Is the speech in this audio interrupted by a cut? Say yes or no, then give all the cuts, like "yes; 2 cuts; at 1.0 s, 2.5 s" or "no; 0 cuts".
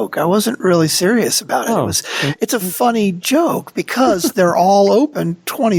no; 0 cuts